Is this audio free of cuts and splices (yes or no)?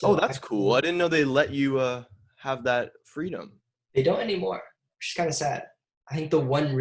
no